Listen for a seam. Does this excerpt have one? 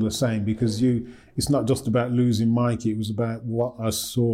no; 0 cuts

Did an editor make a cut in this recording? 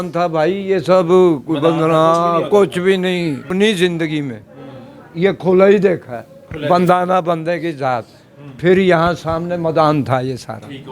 yes; 1 cut; at 3.5 s

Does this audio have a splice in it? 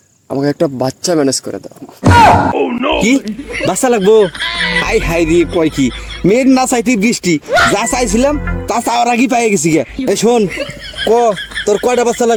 no; 0 cuts

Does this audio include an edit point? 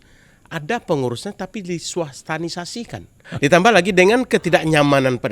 yes; 1 cut; at 3.2 s

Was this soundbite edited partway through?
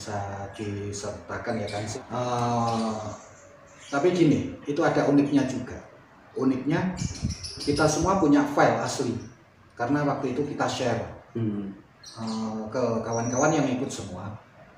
yes; 1 cut; at 1.9 s

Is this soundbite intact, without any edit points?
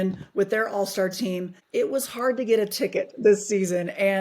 no; 1 cut; at 1.5 s

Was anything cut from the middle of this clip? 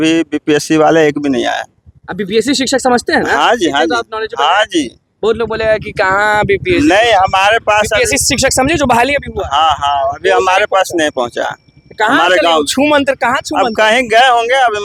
no; 0 cuts

